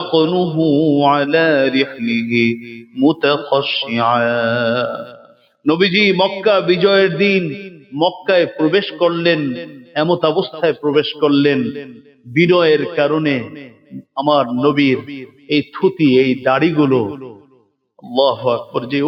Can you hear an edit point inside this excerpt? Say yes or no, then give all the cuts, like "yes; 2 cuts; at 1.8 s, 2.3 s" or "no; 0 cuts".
no; 0 cuts